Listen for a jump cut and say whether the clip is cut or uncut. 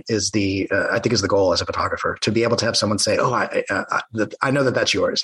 uncut